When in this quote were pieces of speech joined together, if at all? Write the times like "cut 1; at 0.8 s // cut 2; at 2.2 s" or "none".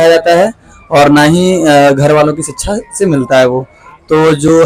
none